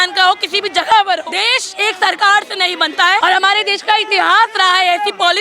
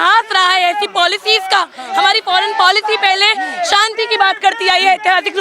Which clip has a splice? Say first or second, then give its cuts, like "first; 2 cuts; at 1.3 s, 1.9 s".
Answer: first; 2 cuts; at 1.3 s, 3.2 s